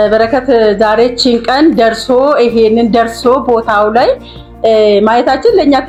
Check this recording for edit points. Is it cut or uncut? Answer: uncut